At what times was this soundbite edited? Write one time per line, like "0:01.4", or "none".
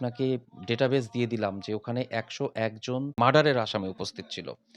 0:03.2